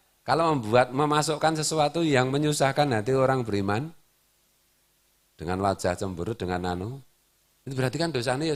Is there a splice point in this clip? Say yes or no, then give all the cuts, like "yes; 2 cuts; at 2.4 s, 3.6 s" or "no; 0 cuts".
no; 0 cuts